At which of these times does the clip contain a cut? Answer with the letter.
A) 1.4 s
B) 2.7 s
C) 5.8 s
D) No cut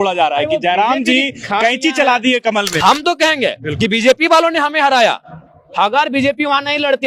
B